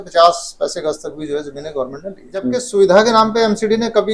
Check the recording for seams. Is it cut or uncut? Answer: cut